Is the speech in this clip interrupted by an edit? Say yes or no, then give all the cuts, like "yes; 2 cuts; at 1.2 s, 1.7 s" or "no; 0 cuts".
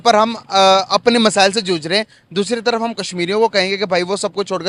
no; 0 cuts